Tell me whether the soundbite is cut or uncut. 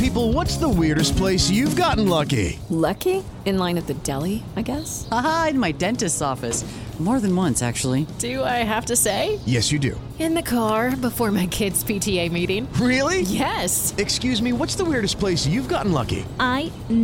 uncut